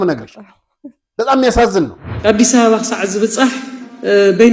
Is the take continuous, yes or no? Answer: no